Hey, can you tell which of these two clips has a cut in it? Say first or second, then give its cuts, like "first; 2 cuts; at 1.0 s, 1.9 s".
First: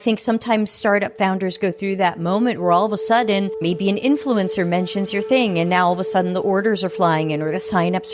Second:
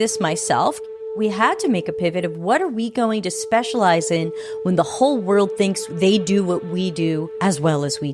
second; 3 cuts; at 0.9 s, 5.9 s, 7.3 s